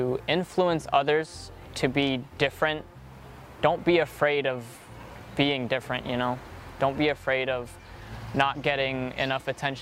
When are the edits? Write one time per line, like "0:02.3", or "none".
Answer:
none